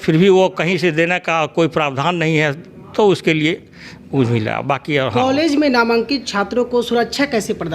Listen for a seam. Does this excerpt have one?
no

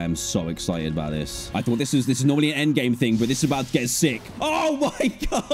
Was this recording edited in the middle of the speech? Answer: yes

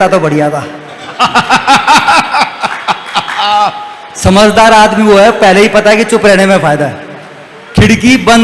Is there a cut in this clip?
no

